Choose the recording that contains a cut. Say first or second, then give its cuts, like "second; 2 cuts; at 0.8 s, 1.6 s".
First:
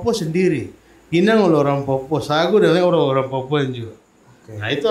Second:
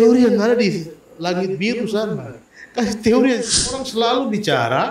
second; 1 cut; at 3.8 s